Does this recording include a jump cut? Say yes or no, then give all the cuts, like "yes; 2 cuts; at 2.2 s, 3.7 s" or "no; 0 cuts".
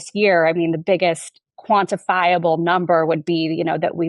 no; 0 cuts